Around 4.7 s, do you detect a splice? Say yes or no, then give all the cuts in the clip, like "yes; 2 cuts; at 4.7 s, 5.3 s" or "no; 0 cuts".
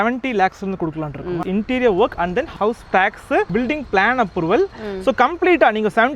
no; 2 cuts; at 1.4 s, 3.5 s